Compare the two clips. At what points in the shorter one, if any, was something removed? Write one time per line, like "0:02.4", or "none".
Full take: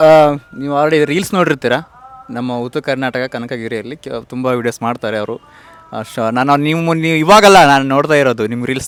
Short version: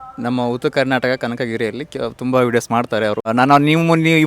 0:03.3